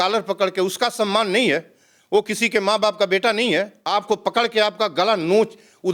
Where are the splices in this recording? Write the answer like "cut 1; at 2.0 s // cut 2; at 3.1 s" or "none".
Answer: cut 1; at 3.8 s